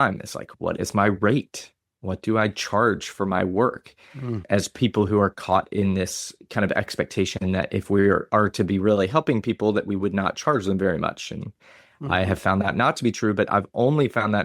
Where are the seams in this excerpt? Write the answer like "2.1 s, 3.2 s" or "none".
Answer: 4.4 s